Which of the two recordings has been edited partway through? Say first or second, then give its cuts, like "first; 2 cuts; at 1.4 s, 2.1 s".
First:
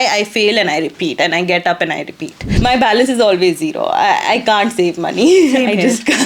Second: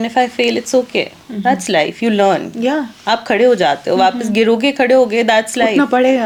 first; 1 cut; at 2.6 s